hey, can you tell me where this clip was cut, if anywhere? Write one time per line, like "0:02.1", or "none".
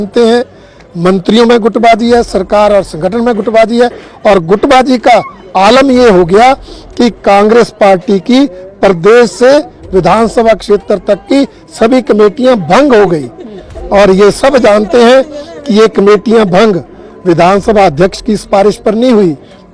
none